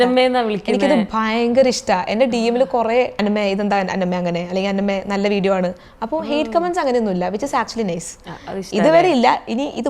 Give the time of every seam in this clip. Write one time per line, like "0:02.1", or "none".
0:03.1